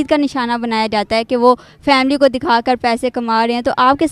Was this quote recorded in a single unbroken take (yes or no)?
yes